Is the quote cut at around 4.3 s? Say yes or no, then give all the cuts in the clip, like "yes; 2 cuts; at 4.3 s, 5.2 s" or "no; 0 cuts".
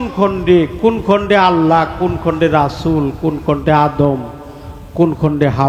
no; 0 cuts